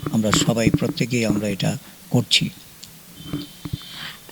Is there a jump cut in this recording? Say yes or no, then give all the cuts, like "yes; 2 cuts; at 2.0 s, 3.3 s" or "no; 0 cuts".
no; 0 cuts